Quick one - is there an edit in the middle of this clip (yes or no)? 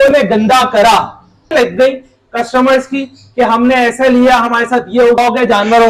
yes